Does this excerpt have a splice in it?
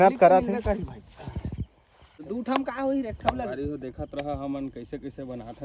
yes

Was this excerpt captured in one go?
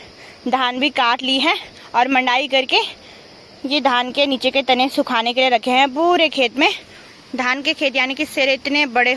yes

